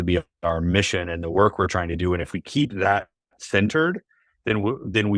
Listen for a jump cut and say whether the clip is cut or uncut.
uncut